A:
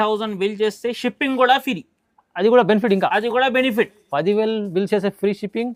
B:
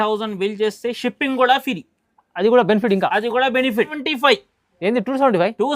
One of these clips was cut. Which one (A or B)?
B